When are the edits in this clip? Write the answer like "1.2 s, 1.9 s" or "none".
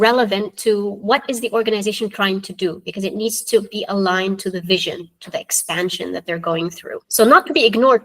7.0 s